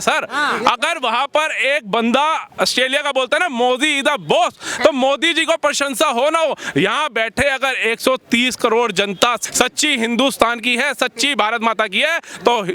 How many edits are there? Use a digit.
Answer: 1